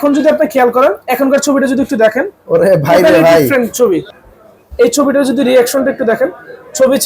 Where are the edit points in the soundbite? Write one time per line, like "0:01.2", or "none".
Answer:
0:04.2